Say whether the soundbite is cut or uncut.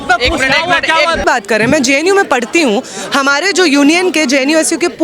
cut